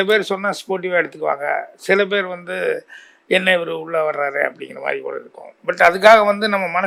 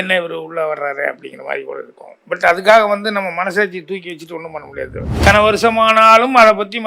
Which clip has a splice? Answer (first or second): second